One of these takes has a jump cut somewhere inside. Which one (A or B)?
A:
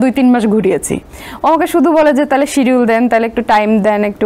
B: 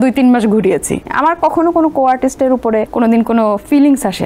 B